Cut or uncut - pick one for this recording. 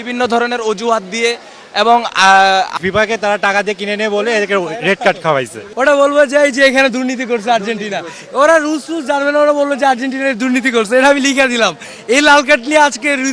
cut